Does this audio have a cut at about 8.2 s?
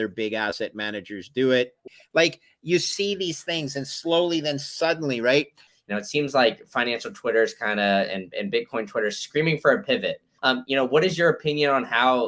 no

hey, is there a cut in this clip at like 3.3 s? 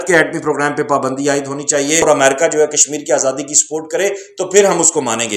no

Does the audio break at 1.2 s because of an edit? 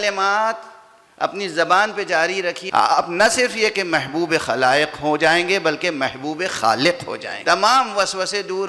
no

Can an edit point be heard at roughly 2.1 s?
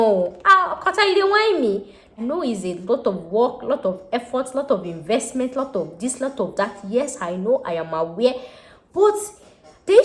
yes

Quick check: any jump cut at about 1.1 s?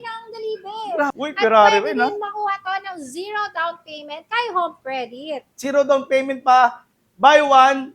yes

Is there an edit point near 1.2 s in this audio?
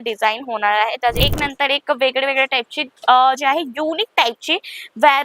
yes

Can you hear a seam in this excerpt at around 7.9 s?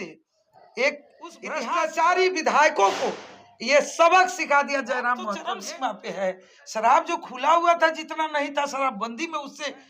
no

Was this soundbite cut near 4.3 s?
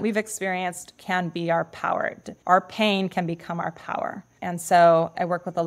yes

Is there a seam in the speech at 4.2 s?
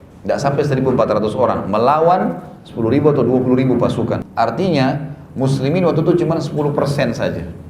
yes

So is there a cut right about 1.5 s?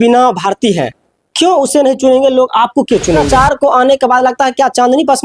no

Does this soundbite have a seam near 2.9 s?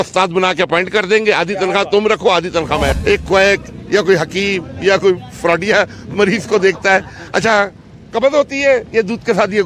yes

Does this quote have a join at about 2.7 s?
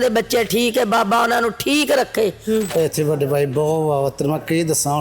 yes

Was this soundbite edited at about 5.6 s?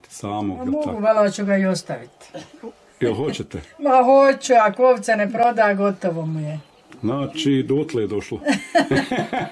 no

